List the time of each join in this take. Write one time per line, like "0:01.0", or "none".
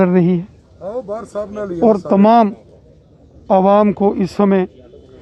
none